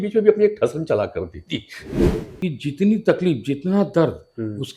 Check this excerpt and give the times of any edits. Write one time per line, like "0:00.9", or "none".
0:02.0